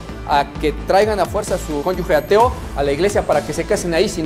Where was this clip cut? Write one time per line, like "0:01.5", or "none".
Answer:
0:01.8